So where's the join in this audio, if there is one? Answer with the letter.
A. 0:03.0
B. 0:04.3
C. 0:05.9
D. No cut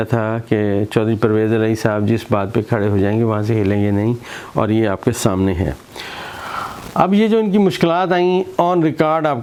D